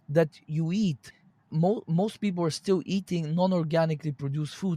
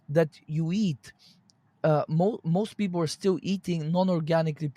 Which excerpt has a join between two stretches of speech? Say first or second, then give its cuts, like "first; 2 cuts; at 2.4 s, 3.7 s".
first; 1 cut; at 1.5 s